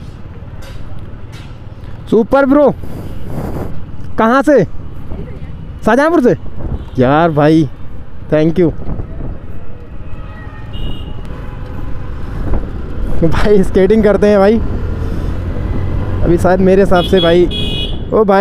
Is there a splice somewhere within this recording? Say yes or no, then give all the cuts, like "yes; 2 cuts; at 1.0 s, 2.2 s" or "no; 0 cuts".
no; 0 cuts